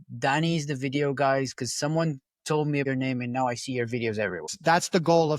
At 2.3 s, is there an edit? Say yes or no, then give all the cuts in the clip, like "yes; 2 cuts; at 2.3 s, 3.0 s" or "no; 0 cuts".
no; 1 cut; at 4.5 s